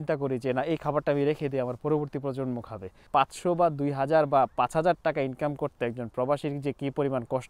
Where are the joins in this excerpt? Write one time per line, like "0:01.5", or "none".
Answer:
0:03.0